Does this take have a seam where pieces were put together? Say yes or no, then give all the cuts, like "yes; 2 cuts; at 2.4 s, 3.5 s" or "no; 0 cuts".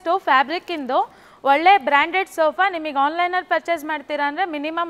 no; 0 cuts